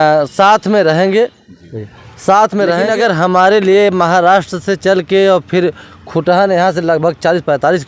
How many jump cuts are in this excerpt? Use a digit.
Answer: 1